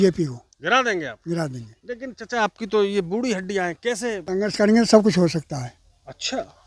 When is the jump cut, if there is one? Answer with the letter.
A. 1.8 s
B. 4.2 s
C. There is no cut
B